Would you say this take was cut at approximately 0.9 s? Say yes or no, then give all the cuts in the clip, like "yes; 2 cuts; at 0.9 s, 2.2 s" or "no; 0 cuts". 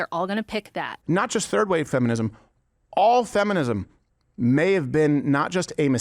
yes; 1 cut; at 0.9 s